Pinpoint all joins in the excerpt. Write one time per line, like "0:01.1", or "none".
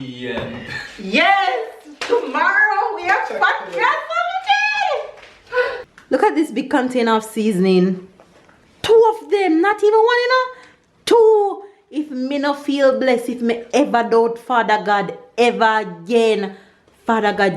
0:05.8